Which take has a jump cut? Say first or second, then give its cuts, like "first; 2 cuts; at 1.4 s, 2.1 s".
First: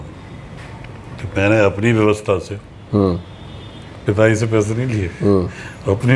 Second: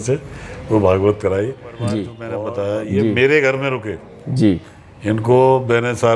second; 1 cut; at 2.2 s